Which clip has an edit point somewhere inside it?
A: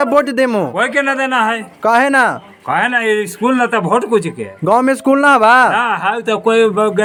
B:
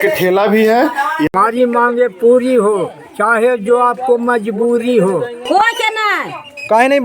B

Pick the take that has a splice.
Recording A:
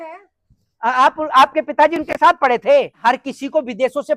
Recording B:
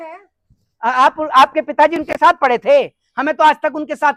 A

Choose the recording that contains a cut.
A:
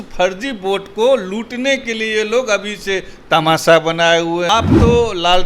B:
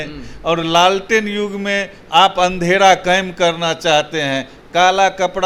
A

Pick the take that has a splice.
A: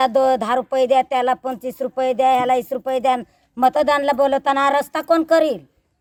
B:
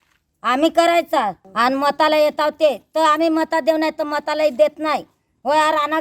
B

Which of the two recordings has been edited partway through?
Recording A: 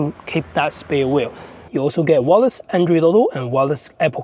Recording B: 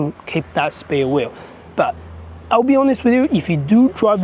A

